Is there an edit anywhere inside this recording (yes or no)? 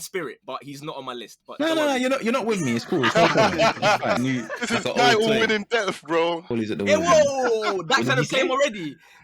yes